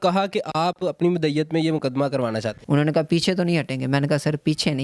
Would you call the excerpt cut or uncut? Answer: cut